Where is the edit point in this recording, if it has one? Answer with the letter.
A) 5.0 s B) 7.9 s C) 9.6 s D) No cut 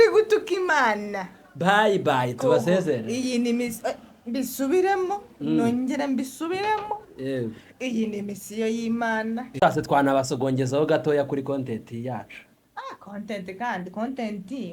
C